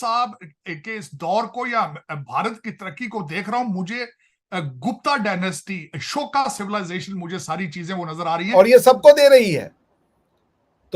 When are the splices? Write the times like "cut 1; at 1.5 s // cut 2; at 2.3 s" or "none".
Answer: cut 1; at 8.4 s